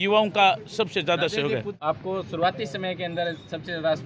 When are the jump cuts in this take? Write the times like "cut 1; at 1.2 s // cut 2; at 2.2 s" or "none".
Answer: cut 1; at 1.7 s